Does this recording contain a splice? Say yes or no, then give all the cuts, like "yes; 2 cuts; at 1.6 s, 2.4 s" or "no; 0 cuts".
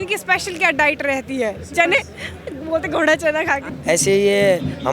yes; 1 cut; at 3.7 s